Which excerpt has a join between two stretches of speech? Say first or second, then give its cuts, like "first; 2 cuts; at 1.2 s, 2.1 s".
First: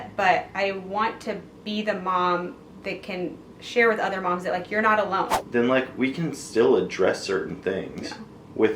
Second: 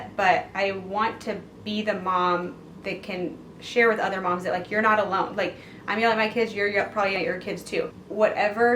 first; 1 cut; at 5.3 s